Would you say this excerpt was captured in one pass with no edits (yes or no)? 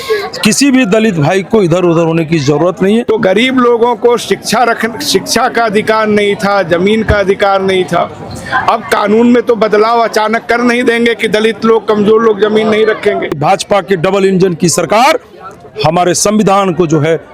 no